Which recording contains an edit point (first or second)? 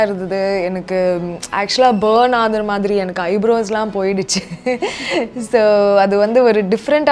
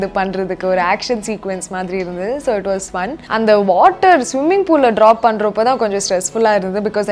second